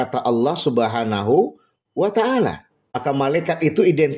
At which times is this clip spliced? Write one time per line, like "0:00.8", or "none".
0:03.0